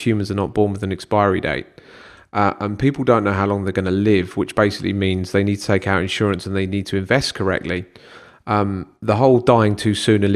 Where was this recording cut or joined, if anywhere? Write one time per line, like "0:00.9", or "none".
none